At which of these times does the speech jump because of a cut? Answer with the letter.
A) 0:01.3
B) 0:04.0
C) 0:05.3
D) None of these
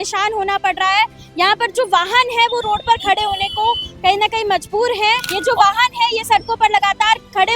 C